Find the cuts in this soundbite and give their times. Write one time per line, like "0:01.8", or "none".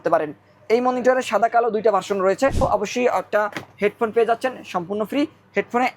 0:02.6